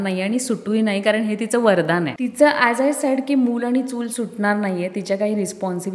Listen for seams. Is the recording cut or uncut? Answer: cut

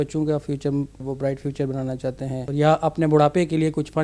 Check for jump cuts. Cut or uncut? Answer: cut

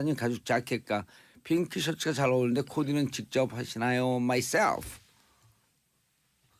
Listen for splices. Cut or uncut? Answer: cut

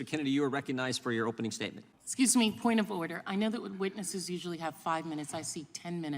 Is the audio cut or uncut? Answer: cut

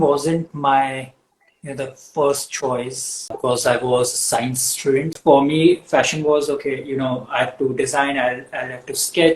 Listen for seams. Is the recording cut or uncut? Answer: cut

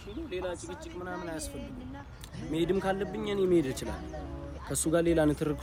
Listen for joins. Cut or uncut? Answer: uncut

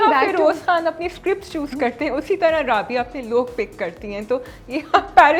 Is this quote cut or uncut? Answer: uncut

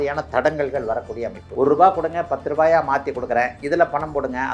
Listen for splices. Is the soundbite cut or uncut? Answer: cut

